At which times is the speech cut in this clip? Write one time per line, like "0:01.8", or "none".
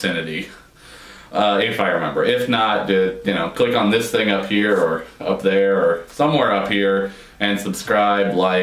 0:01.6